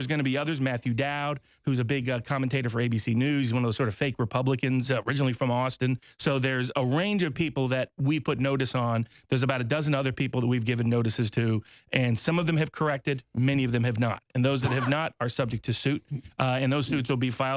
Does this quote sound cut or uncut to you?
cut